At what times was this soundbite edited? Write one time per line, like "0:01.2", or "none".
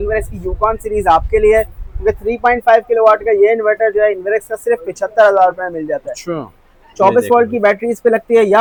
none